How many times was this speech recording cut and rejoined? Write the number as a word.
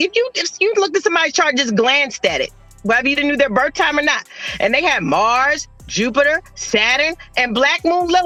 zero